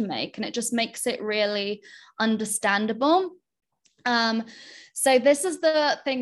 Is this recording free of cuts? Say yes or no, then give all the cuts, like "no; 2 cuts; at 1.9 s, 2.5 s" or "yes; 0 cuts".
yes; 0 cuts